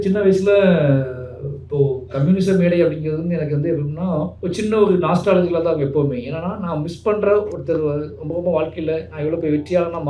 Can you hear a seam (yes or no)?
yes